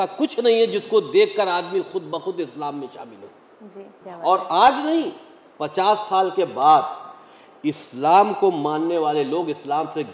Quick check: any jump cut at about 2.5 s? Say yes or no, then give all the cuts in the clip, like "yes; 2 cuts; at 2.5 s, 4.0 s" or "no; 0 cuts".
no; 1 cut; at 3.9 s